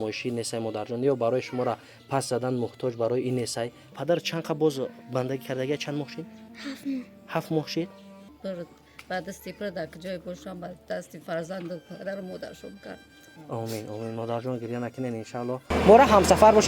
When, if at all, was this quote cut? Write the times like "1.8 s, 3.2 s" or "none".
3.9 s, 8.2 s, 15.7 s